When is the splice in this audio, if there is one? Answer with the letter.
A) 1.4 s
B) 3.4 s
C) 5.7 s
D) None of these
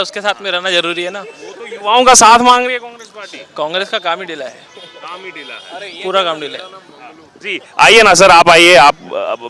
D